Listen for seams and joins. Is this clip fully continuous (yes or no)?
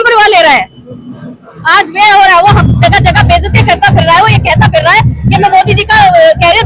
yes